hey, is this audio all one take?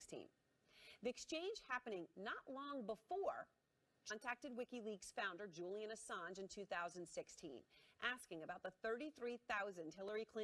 yes; 0 cuts

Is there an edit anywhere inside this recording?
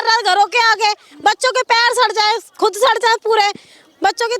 no; 0 cuts

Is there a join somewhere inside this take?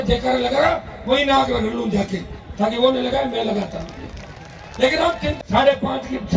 yes; 1 cut; at 5.3 s

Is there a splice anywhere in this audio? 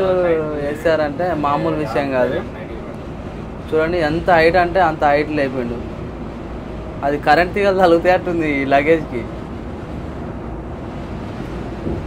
no; 0 cuts

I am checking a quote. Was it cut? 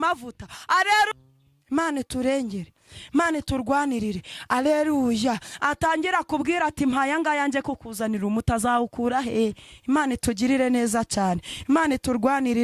yes; 1 cut; at 1.1 s

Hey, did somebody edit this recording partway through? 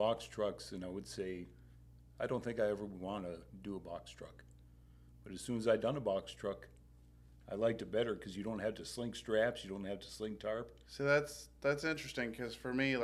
no; 0 cuts

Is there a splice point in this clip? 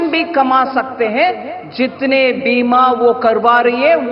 no; 0 cuts

